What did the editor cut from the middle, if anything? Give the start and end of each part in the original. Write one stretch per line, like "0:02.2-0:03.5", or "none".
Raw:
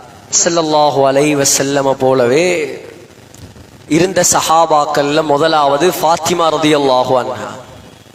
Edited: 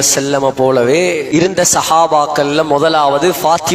0:02.7-0:03.8